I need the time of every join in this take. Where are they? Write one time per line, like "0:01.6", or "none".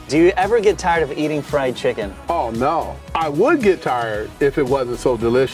none